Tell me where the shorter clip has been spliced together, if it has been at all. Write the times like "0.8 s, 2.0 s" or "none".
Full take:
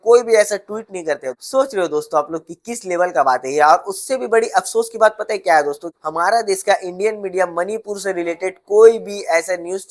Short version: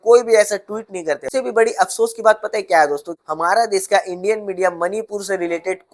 1.2 s